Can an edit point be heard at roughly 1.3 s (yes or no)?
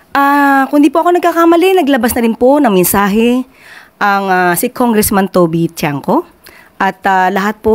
no